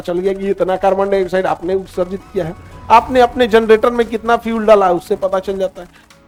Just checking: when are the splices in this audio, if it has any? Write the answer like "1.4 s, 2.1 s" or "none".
none